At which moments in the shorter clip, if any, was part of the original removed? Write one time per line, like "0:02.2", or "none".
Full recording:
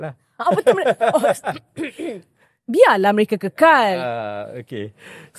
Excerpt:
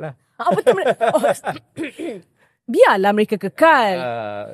none